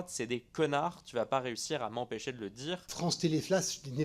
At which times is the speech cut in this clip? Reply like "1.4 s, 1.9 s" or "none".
2.9 s